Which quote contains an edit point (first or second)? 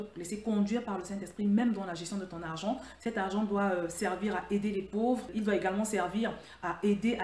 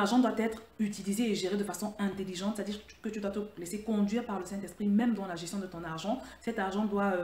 first